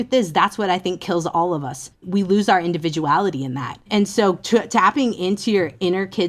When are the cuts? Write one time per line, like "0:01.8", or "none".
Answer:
0:02.1
0:03.9